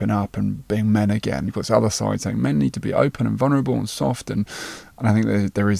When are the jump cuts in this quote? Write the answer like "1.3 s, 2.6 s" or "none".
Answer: 1.5 s